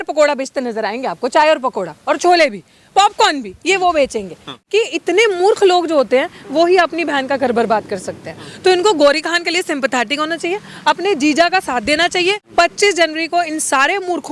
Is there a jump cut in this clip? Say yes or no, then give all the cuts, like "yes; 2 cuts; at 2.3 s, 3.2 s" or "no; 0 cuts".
yes; 2 cuts; at 4.5 s, 12.4 s